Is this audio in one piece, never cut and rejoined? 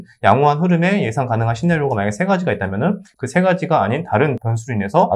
yes; 0 cuts

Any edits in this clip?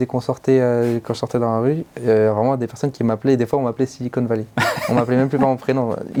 no; 0 cuts

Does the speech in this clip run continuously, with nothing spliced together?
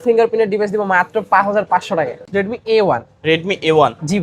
no; 1 cut; at 2.2 s

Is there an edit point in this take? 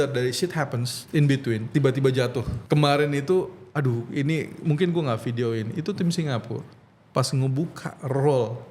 yes; 3 cuts; at 0.9 s, 1.7 s, 2.5 s

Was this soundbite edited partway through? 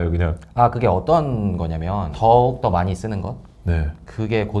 yes; 1 cut; at 2.1 s

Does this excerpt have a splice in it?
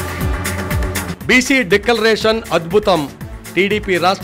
no; 0 cuts

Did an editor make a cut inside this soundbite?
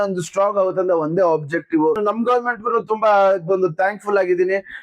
yes; 1 cut; at 2.0 s

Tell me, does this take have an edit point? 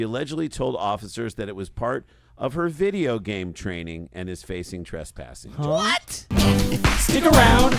yes; 1 cut; at 6.3 s

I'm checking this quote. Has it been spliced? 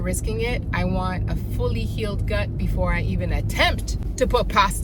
no; 0 cuts

